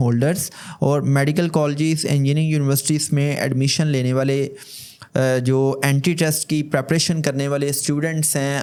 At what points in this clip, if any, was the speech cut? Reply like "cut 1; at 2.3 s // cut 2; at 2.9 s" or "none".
none